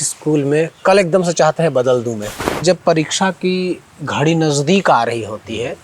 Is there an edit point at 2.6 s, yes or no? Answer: yes